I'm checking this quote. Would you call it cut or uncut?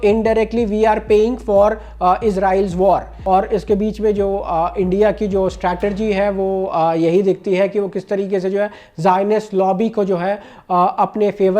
cut